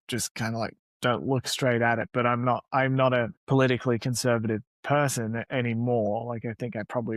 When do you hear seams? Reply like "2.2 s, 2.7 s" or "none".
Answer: 3.4 s, 4.7 s